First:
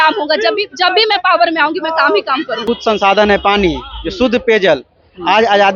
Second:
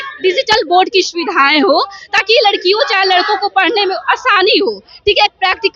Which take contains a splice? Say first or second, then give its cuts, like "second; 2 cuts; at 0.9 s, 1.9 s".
first; 1 cut; at 2.6 s